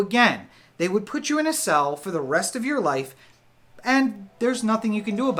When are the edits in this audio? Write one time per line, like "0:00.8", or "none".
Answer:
none